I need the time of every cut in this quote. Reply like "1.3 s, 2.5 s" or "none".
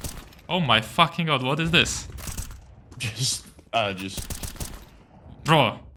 none

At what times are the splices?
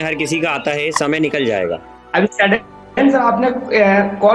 1.9 s

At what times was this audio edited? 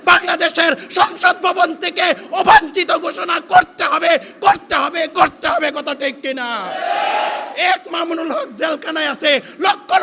7.5 s

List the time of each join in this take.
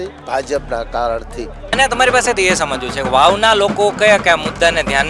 1.7 s

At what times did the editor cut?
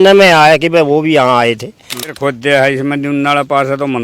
2.1 s

